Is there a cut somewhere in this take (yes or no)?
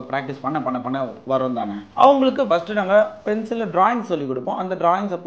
yes